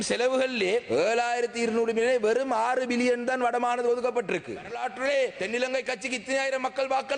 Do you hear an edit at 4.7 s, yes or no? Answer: yes